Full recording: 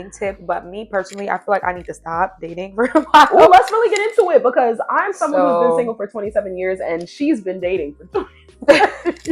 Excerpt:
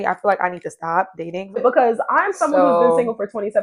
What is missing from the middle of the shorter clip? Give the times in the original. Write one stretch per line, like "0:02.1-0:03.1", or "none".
0:02.8-0:04.4